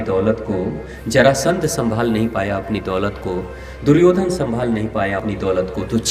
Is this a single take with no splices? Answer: no; 1 cut; at 5.2 s

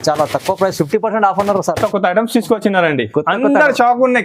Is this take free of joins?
no; 1 cut; at 1.9 s

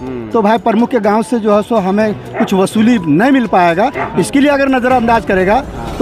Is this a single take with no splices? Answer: yes; 0 cuts

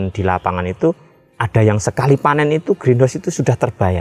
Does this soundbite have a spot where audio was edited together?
no; 0 cuts

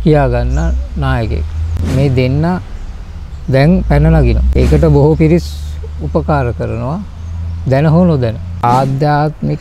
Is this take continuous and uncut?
no; 2 cuts; at 4.4 s, 8.6 s

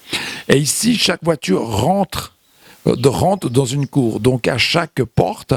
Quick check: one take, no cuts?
yes; 0 cuts

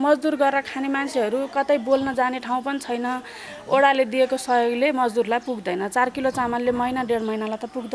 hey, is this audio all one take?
yes; 0 cuts

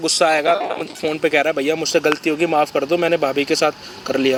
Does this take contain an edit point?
no; 0 cuts

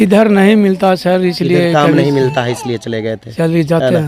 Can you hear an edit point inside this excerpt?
no; 0 cuts

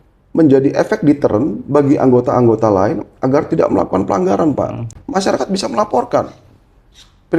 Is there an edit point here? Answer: yes; 1 cut; at 4.9 s

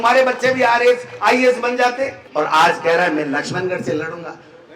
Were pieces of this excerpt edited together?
yes; 1 cut; at 2.2 s

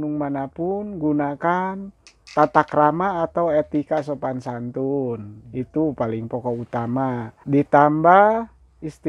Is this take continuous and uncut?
no; 1 cut; at 7.3 s

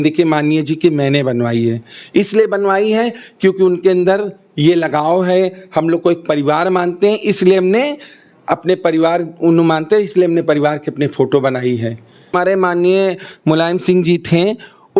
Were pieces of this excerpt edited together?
yes; 1 cut; at 12.3 s

